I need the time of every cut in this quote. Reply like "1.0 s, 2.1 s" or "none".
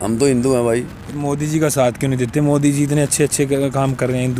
none